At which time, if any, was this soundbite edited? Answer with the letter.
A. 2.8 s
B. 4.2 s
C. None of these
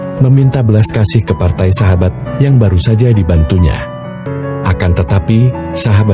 B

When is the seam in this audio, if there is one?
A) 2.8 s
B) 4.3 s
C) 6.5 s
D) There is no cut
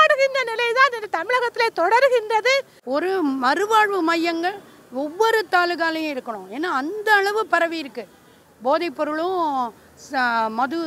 A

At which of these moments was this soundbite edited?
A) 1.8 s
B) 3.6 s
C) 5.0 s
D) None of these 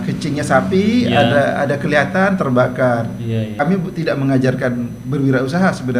B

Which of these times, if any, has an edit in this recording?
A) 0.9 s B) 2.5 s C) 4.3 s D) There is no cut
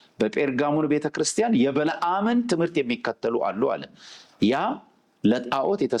D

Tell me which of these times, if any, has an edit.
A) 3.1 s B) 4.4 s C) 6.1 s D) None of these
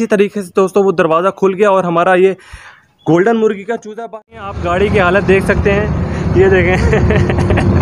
B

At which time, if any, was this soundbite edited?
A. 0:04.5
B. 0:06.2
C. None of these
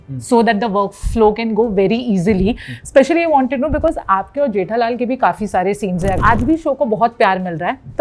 B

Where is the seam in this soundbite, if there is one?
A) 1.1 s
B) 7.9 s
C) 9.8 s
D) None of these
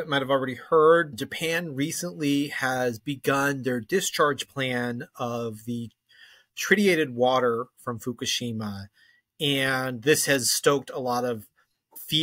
A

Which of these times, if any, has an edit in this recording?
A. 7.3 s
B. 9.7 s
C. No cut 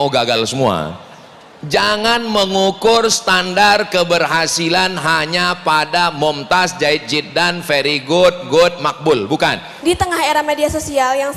B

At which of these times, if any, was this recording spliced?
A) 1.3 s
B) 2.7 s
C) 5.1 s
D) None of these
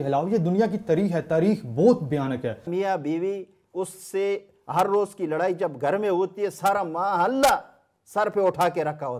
B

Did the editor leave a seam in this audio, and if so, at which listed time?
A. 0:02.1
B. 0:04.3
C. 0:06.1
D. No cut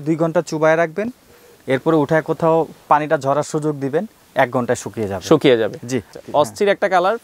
C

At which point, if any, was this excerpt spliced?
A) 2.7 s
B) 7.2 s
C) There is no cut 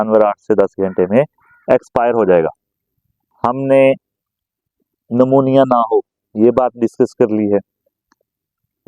A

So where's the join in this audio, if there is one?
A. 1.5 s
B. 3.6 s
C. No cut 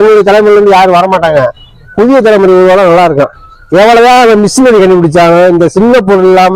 B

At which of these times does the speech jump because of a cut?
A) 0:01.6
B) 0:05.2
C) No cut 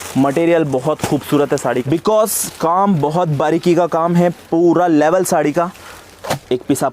A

